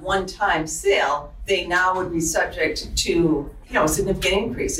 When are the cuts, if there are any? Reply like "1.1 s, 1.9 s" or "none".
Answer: 1.3 s, 3.6 s